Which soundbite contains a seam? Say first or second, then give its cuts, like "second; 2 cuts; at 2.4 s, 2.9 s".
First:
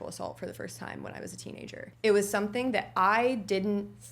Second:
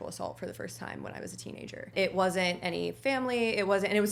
first; 1 cut; at 1.8 s